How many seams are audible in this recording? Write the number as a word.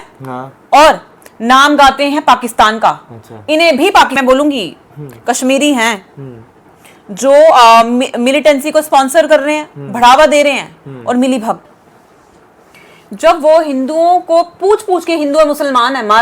two